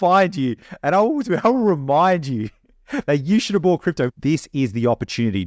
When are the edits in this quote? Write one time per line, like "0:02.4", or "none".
0:04.1